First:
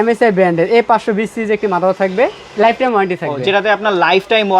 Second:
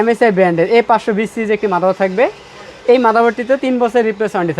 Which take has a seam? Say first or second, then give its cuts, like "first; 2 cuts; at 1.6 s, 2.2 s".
first; 1 cut; at 2.4 s